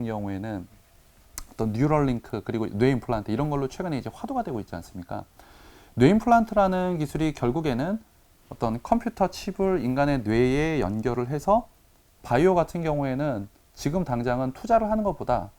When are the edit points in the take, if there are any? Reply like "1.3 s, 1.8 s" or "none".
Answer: 12.1 s